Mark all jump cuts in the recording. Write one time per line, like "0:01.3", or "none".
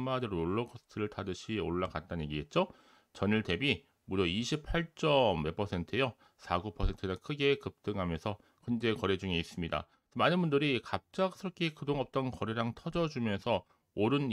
0:08.5